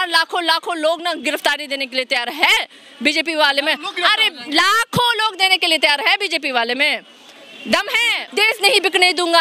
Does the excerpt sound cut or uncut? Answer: cut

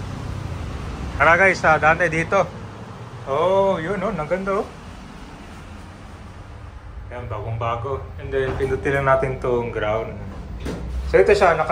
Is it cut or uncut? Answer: cut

